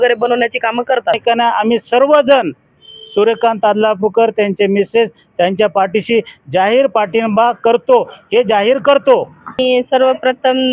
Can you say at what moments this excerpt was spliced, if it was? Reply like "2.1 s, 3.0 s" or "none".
1.2 s, 9.6 s